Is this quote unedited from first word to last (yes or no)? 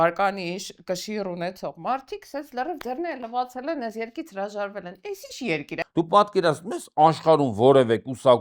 no